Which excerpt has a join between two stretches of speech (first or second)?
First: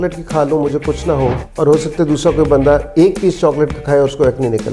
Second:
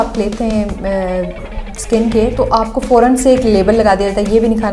first